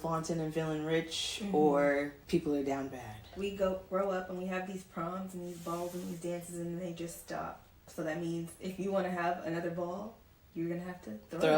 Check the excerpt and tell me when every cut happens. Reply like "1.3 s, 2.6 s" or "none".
2.2 s, 3.3 s, 7.9 s